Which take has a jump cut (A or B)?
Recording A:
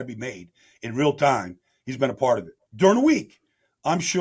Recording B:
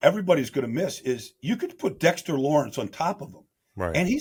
A